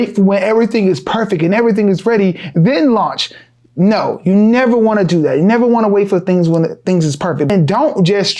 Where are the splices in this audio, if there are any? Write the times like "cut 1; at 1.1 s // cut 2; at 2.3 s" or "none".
cut 1; at 7.5 s